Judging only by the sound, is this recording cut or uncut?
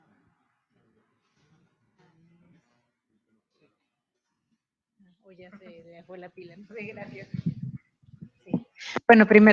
uncut